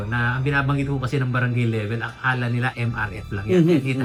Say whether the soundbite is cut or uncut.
uncut